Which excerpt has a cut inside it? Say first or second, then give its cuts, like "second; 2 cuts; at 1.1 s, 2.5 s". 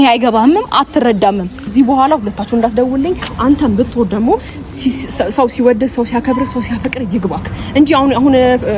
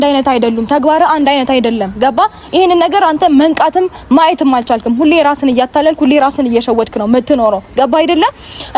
first; 1 cut; at 1.7 s